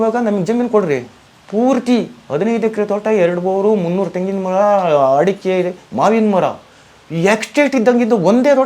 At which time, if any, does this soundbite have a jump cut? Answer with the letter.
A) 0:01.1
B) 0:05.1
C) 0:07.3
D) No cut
D